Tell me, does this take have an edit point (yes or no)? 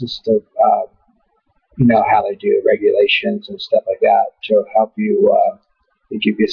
yes